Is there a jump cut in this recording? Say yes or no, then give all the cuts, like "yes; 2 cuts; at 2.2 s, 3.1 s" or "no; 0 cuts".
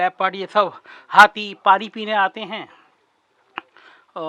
no; 0 cuts